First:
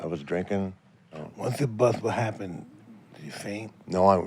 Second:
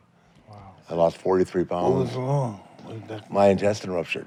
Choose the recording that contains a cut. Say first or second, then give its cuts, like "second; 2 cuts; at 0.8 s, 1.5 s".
first; 1 cut; at 1.2 s